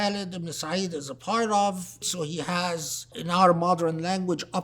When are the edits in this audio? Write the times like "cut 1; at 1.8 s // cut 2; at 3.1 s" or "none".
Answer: cut 1; at 2.1 s // cut 2; at 3.2 s